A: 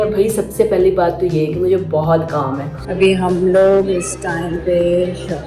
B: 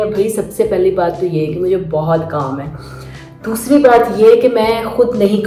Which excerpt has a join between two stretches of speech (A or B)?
A